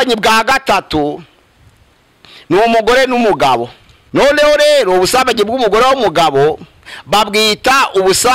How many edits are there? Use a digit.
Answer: 1